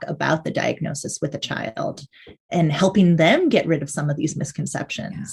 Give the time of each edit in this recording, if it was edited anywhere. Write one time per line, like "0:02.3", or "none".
none